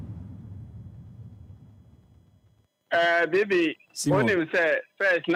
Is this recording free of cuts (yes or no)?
yes